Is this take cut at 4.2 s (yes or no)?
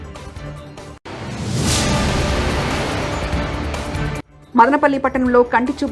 yes